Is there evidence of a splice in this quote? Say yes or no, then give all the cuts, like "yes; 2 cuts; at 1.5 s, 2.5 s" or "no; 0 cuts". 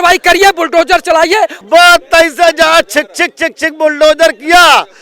yes; 1 cut; at 1.6 s